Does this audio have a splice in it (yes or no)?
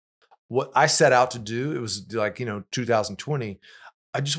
no